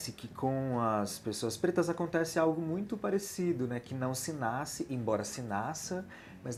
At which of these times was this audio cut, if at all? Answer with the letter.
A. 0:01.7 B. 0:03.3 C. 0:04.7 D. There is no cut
D